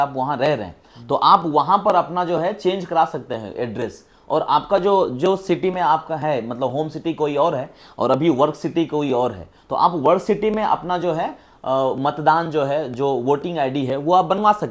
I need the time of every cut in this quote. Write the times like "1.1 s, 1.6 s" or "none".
none